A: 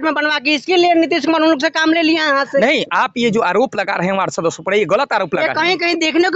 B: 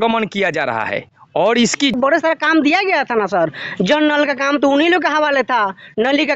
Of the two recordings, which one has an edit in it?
B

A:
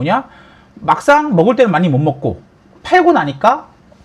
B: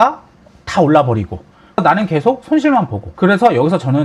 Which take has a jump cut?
B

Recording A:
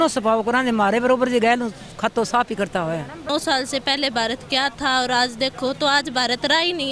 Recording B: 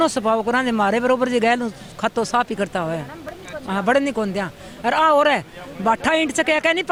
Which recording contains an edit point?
A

